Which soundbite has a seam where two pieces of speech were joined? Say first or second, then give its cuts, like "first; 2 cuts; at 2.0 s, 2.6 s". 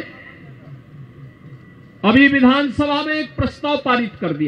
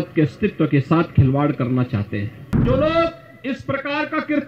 second; 1 cut; at 2.6 s